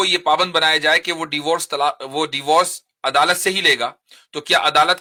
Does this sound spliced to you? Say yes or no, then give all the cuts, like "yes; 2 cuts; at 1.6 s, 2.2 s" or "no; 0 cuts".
no; 0 cuts